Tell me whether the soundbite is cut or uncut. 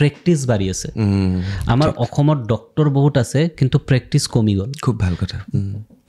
uncut